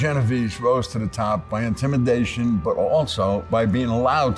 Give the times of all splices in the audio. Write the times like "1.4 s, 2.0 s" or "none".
3.4 s